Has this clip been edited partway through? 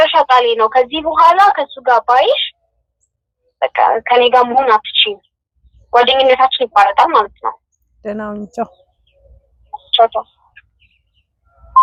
no; 0 cuts

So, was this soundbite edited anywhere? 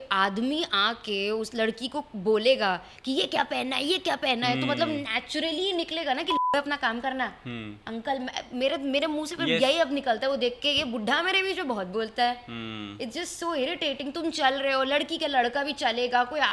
no; 0 cuts

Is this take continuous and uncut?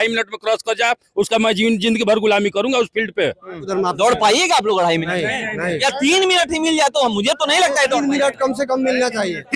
no; 1 cut; at 3.7 s

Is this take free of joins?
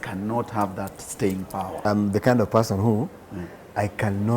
no; 1 cut; at 1.8 s

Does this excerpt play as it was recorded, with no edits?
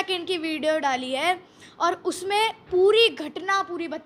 yes; 0 cuts

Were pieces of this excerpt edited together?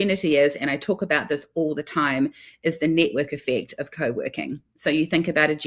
no; 0 cuts

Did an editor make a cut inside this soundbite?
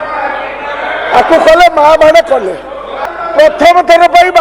yes; 1 cut; at 3.0 s

